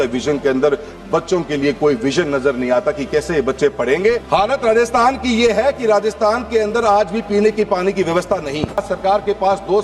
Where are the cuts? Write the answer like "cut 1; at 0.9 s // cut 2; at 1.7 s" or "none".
cut 1; at 4.2 s // cut 2; at 8.8 s